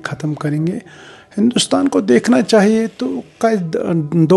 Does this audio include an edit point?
no; 0 cuts

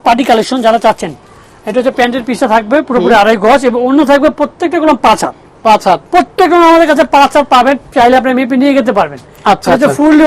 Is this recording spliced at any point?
no; 0 cuts

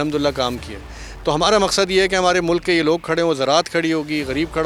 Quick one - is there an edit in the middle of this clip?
no; 0 cuts

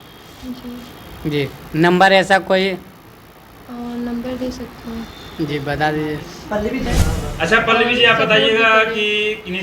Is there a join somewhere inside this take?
yes; 1 cut; at 6.9 s

